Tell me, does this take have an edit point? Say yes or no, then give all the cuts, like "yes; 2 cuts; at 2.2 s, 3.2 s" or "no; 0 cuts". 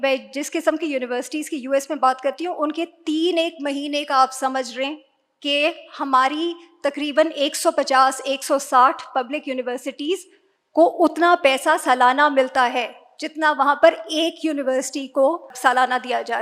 yes; 1 cut; at 15.5 s